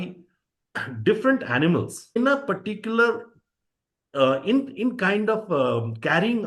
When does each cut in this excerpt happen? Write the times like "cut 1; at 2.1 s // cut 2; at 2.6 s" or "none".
cut 1; at 2.2 s